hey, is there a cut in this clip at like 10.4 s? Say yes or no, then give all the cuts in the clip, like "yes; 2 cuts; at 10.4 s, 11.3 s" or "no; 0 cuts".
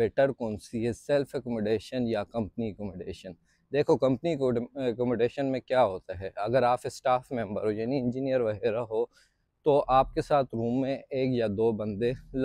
no; 0 cuts